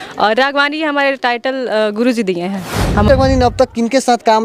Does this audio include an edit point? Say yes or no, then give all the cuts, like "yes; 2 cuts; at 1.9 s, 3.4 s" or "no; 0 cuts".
yes; 1 cut; at 3.1 s